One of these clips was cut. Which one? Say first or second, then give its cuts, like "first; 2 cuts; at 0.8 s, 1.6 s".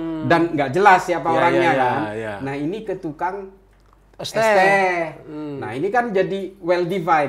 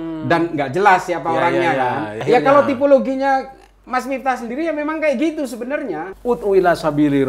second; 2 cuts; at 2.2 s, 6.1 s